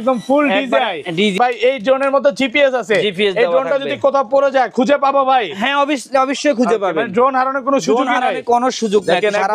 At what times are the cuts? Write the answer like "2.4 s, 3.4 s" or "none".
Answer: 1.3 s